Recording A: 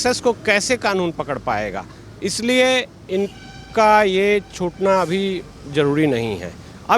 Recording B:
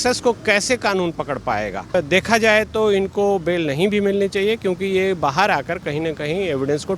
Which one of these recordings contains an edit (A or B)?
B